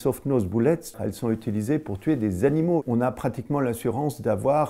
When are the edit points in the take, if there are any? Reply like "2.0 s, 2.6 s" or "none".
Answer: 0.9 s, 2.8 s